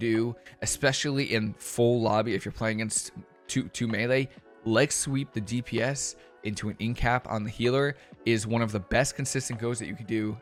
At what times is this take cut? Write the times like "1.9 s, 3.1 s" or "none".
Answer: none